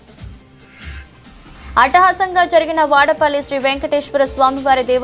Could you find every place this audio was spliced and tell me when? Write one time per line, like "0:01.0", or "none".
0:01.1